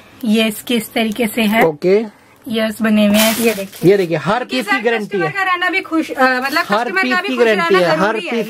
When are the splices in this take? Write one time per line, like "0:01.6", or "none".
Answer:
0:03.4